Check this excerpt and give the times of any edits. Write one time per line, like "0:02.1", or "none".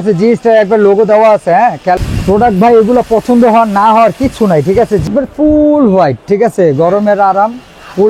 0:02.0
0:05.0